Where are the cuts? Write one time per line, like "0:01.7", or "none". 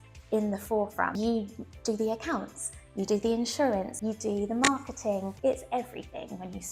0:01.2
0:03.9
0:05.3